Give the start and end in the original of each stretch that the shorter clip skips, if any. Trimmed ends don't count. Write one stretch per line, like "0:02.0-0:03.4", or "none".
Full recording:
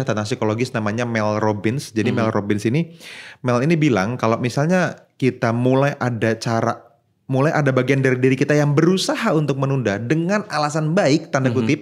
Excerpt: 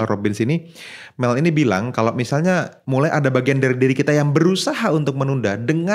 0:05.0-0:07.2